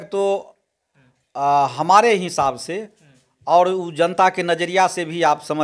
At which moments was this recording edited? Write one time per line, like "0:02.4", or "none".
none